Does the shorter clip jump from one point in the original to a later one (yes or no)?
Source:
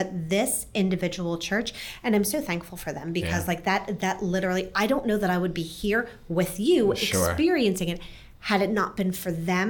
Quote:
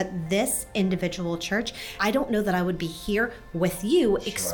yes